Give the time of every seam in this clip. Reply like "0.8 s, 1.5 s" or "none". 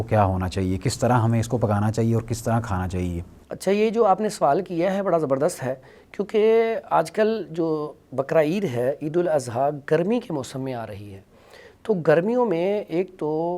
none